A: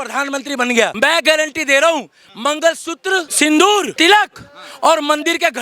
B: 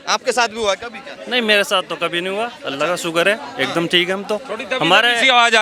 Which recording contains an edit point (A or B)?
A